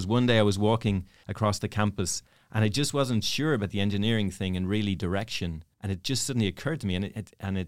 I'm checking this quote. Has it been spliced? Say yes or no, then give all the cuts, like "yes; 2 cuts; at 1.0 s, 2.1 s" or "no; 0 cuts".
yes; 2 cuts; at 1.2 s, 5.7 s